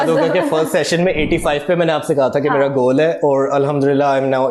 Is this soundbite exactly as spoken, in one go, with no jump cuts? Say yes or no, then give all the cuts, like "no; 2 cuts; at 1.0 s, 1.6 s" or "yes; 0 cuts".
yes; 0 cuts